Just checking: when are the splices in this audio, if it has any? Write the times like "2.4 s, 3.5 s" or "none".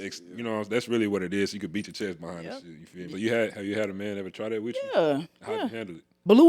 3.1 s, 5.5 s